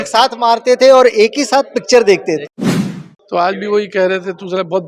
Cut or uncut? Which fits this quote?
cut